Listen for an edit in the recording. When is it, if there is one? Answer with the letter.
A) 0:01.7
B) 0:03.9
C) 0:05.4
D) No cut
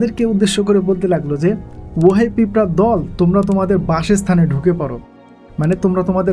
A